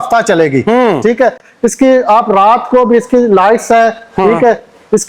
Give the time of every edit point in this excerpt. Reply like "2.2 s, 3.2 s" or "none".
none